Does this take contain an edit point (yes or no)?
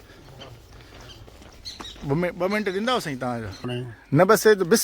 yes